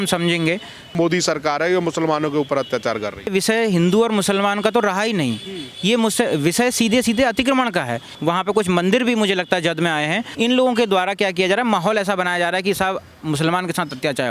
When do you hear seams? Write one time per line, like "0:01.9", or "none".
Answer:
0:00.9
0:03.3
0:08.1
0:10.2